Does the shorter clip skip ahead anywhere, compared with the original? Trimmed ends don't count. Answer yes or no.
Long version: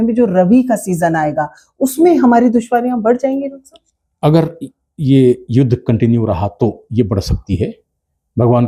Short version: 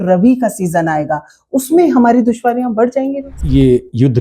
yes